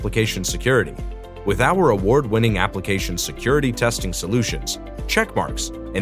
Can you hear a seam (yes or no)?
no